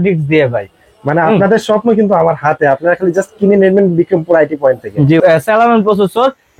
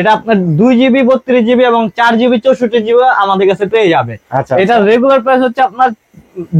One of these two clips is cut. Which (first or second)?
first